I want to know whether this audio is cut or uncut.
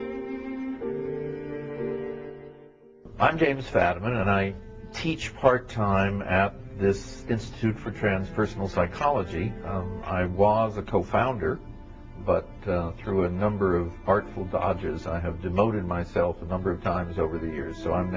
cut